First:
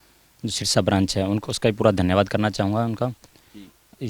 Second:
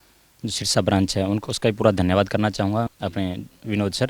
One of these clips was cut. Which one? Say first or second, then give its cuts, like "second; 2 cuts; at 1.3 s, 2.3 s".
second; 1 cut; at 2.9 s